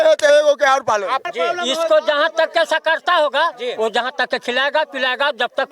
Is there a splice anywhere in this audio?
yes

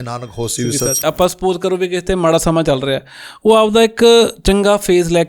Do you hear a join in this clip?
yes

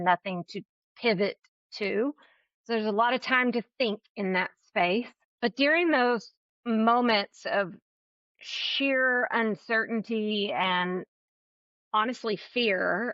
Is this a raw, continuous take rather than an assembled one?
no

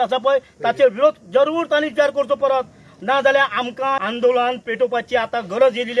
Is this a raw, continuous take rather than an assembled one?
no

